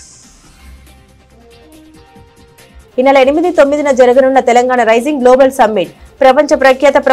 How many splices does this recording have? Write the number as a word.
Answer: two